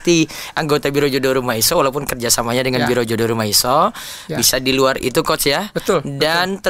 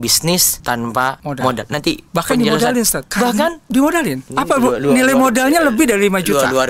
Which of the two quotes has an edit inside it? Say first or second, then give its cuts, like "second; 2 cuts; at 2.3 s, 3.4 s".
second; 3 cuts; at 1.0 s, 3.0 s, 4.2 s